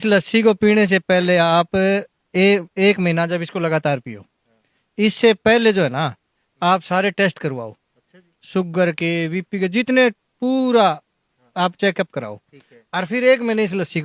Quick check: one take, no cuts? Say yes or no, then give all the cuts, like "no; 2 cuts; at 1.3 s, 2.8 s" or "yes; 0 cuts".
yes; 0 cuts